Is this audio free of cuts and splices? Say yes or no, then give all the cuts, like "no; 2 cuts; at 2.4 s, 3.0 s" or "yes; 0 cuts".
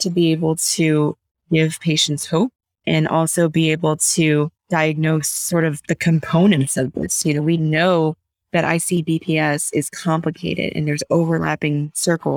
no; 1 cut; at 4.6 s